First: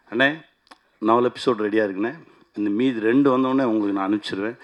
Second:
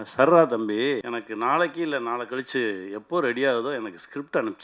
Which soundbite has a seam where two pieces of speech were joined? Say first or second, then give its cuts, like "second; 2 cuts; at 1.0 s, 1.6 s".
second; 1 cut; at 1.0 s